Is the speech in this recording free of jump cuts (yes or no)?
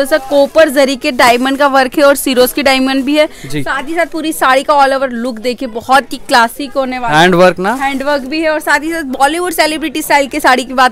yes